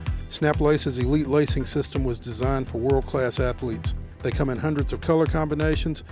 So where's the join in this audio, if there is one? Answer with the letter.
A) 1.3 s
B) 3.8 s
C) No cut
C